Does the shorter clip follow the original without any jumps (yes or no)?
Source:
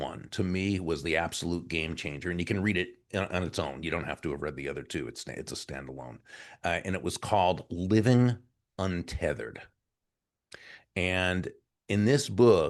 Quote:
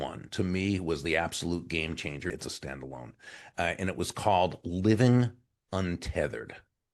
no